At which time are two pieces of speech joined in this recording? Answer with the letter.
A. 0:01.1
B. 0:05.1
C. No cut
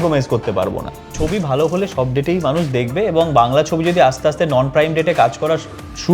A